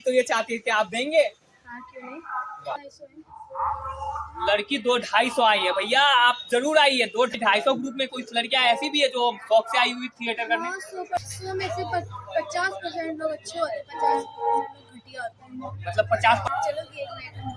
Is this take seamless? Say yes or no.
no